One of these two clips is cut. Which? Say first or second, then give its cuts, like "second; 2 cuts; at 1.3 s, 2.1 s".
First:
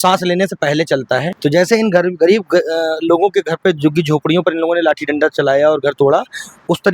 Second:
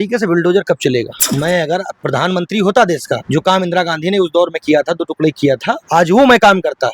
second; 4 cuts; at 1.2 s, 1.9 s, 3.2 s, 5.8 s